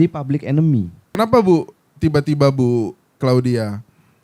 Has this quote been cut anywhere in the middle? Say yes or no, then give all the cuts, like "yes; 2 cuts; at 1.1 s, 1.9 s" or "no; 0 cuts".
yes; 1 cut; at 1.2 s